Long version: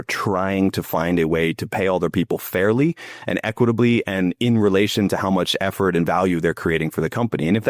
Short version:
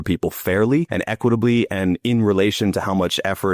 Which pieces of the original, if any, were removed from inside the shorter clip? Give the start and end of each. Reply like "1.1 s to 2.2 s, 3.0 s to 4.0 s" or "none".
3.0 s to 3.3 s